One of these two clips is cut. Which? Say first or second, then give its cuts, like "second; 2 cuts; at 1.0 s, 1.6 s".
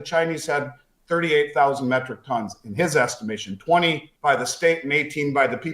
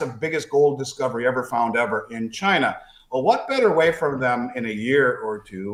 first; 1 cut; at 4.1 s